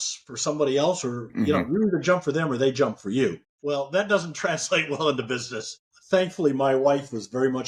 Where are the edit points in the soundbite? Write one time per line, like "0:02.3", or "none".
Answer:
none